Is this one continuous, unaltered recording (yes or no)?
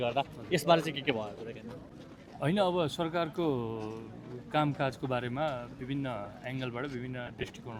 yes